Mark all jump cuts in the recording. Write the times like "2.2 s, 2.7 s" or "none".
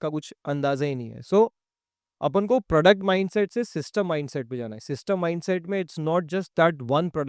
none